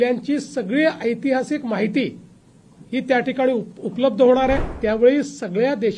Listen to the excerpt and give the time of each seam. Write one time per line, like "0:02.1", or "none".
0:04.7